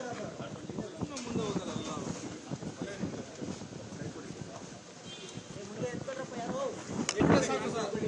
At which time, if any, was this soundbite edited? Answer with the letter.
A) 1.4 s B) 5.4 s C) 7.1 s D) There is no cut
C